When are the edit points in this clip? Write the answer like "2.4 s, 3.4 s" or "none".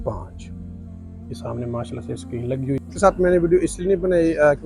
2.9 s